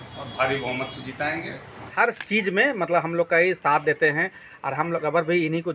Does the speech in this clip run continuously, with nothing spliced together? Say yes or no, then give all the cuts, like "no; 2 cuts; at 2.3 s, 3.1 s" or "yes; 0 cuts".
no; 1 cut; at 1.9 s